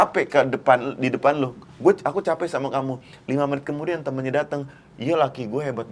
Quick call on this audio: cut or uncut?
uncut